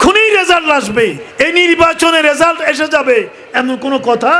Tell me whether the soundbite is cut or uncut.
cut